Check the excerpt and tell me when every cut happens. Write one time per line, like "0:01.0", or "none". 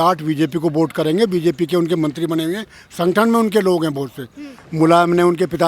0:04.6